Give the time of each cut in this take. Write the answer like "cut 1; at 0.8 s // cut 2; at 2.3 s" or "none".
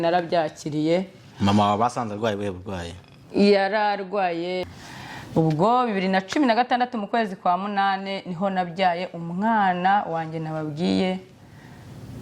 cut 1; at 4.8 s